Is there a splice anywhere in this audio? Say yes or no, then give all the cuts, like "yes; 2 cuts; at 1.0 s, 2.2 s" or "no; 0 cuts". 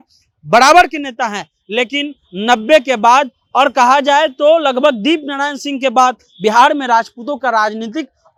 no; 0 cuts